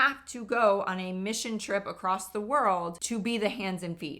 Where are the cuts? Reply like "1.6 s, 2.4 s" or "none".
3.0 s